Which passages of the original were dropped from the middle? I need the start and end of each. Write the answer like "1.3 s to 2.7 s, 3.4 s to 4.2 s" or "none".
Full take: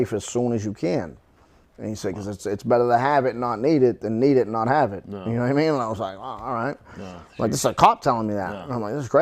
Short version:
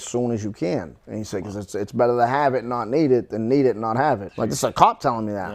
1.2 s to 1.7 s, 5.0 s to 7.3 s